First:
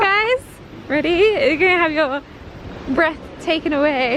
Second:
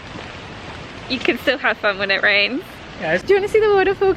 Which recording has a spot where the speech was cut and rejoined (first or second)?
second